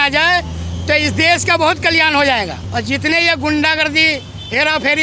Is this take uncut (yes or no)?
yes